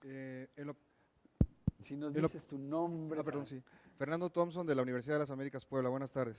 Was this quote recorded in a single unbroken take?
no; 1 cut; at 3.9 s

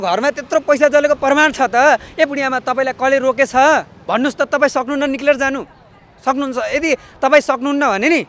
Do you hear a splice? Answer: no; 0 cuts

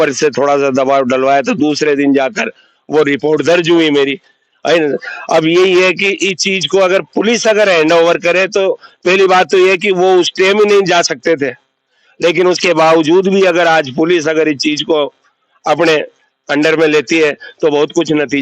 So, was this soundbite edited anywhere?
no; 0 cuts

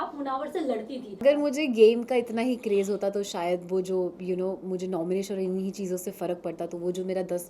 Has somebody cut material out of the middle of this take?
yes; 1 cut; at 1.2 s

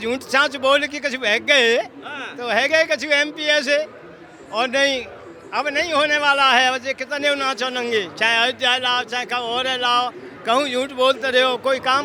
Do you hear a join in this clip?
no; 0 cuts

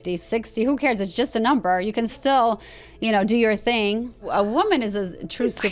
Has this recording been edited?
yes; 1 cut; at 4.3 s

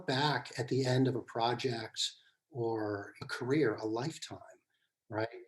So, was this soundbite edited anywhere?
yes; 1 cut; at 3.1 s

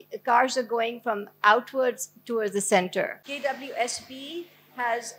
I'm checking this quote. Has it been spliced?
yes; 1 cut; at 3.2 s

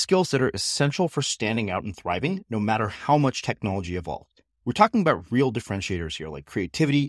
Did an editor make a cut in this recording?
no; 0 cuts

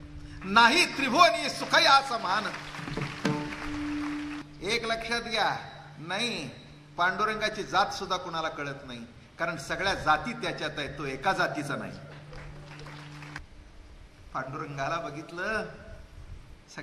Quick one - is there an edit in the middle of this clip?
yes; 2 cuts; at 4.4 s, 13.4 s

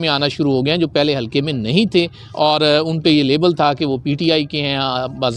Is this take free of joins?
yes; 0 cuts

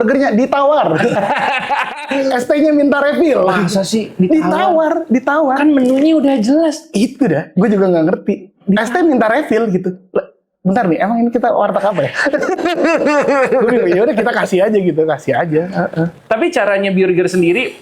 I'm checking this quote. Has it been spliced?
no; 0 cuts

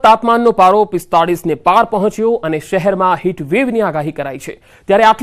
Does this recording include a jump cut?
yes; 1 cut; at 1.7 s

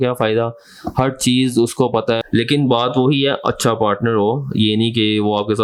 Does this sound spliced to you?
no; 0 cuts

